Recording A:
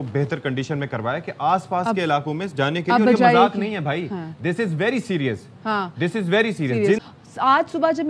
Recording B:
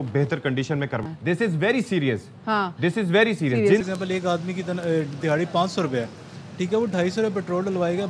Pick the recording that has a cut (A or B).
B